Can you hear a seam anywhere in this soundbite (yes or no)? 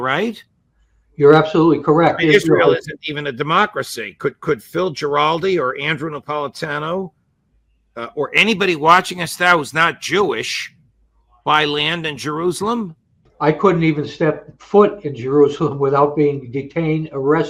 no